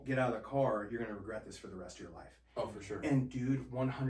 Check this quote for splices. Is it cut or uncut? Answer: uncut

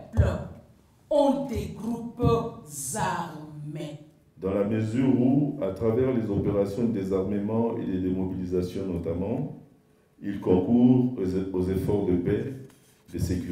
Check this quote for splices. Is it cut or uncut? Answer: cut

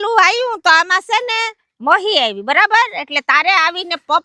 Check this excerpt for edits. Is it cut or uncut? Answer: uncut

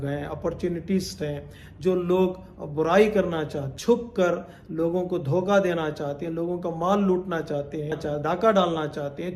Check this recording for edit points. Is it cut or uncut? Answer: cut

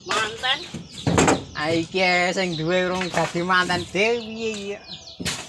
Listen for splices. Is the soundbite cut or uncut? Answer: uncut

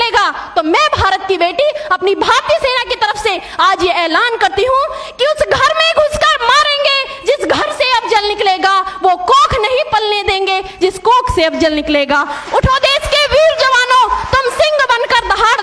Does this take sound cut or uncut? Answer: uncut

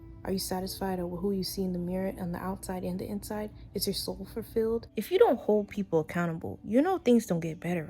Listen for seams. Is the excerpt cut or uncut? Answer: cut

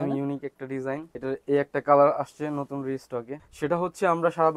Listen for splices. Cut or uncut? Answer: cut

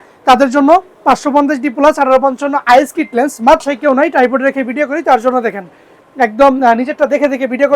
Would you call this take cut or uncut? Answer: cut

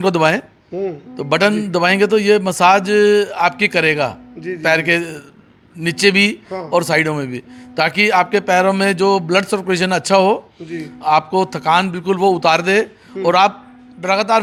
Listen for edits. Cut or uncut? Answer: uncut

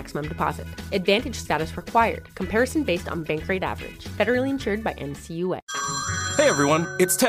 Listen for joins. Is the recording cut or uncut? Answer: cut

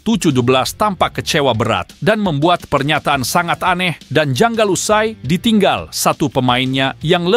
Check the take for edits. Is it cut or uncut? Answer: uncut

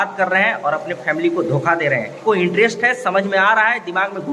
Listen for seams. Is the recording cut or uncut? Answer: cut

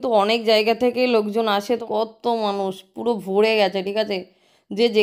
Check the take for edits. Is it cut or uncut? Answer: cut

